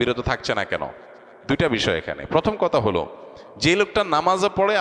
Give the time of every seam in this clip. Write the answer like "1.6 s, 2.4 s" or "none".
none